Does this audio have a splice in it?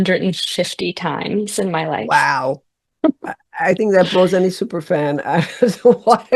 no; 0 cuts

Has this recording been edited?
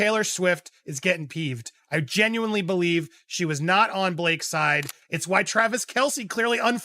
yes; 1 cut; at 5.0 s

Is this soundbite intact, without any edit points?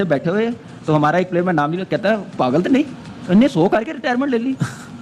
yes; 0 cuts

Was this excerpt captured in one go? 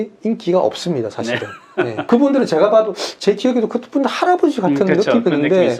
no; 1 cut; at 2.0 s

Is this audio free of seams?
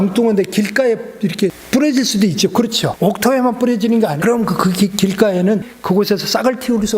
no; 4 cuts; at 1.6 s, 2.9 s, 4.2 s, 5.7 s

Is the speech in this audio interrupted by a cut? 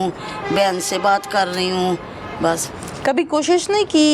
no; 0 cuts

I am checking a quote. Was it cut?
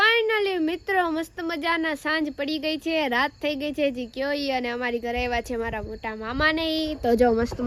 no; 0 cuts

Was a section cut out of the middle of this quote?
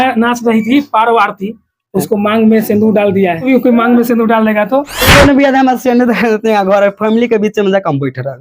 yes; 2 cuts; at 3.4 s, 5.0 s

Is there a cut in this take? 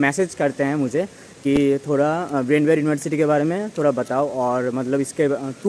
no; 0 cuts

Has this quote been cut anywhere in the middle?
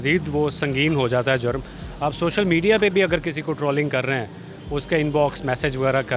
no; 0 cuts

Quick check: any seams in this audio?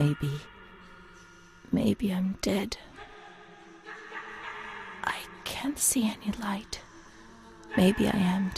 no; 0 cuts

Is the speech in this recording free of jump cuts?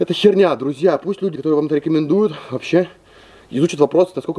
yes; 0 cuts

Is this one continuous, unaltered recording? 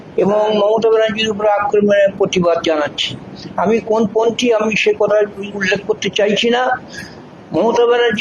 yes; 0 cuts

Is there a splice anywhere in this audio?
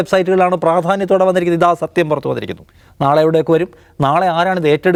no; 0 cuts

